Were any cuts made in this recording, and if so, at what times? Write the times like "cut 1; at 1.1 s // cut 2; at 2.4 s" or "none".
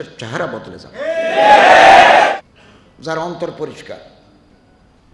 cut 1; at 2.3 s